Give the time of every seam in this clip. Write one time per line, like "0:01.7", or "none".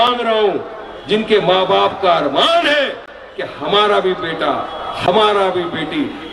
none

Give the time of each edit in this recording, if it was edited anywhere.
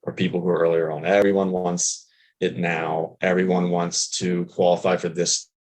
0:01.2

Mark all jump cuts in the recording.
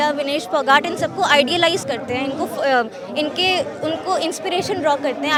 none

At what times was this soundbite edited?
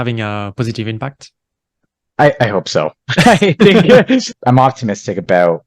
0:04.3

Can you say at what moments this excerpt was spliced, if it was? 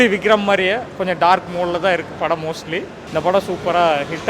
0:03.0

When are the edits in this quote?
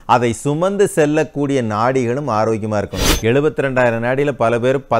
0:03.0

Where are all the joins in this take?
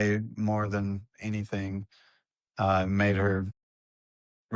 none

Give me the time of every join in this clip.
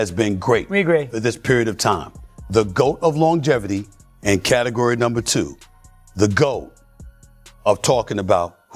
none

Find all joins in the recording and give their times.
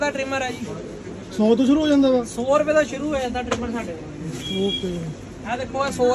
none

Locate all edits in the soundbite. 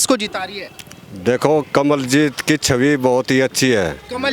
none

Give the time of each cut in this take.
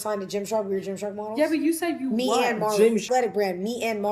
0:03.0

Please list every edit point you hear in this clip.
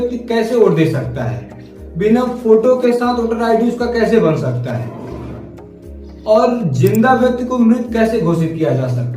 none

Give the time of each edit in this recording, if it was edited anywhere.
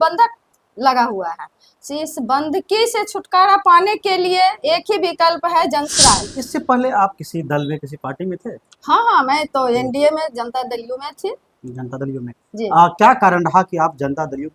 0:06.3

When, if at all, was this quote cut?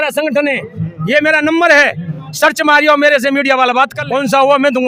0:04.0

